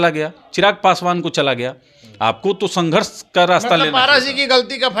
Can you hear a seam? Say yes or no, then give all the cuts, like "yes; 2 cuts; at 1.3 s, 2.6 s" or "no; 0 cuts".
no; 0 cuts